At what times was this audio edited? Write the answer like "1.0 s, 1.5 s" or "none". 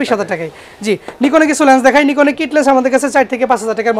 none